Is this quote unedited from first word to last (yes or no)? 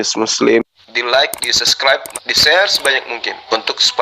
yes